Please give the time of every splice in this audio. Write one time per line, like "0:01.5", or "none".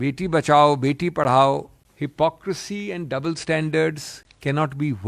0:01.8